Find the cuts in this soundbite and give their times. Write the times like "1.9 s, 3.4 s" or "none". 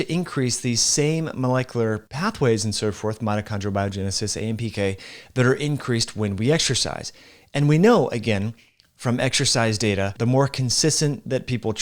2.1 s, 10.1 s